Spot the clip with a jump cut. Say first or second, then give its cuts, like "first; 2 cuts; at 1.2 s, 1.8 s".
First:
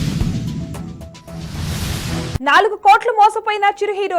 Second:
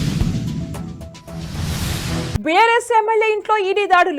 first; 1 cut; at 2.3 s